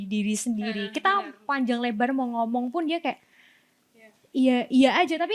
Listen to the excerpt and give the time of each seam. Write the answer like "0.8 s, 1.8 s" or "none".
none